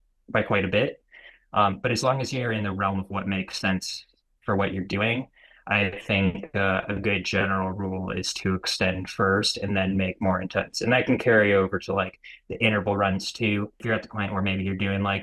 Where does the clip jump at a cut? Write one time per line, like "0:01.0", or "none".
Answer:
0:13.8